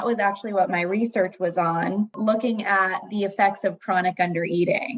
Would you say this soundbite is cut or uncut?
cut